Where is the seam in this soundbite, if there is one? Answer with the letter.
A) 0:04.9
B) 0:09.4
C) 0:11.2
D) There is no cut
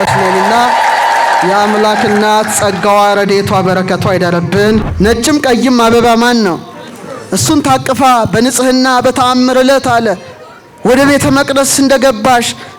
A